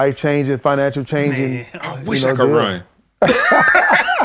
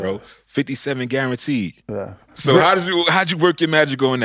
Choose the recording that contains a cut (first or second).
second